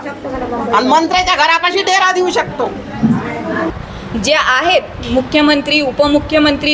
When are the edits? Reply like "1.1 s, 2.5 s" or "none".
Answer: 3.9 s